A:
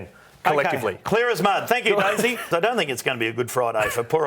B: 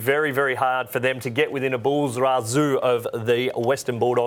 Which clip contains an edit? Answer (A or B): A